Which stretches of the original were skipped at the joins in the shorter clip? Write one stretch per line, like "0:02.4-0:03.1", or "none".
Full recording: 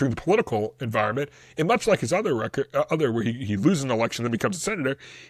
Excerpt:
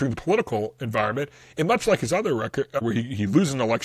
0:02.8-0:03.1